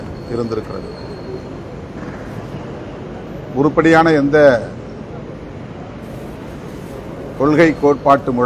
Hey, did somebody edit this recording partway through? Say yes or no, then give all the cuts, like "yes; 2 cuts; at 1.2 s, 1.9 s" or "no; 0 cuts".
no; 0 cuts